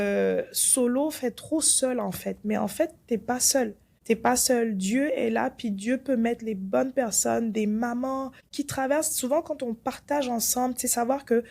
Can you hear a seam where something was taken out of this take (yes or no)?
yes